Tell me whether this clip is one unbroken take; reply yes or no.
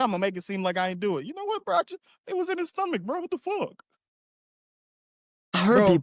yes